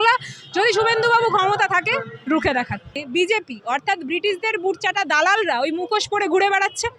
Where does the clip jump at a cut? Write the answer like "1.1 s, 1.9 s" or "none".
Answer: 3.0 s